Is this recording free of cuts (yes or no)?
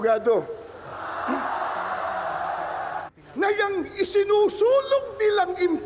no